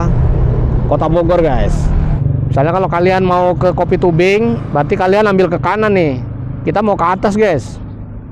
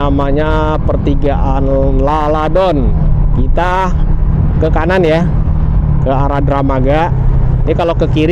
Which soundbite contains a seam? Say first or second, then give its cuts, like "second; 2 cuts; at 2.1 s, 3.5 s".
first; 1 cut; at 2.1 s